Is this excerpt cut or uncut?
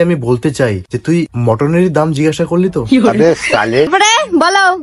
cut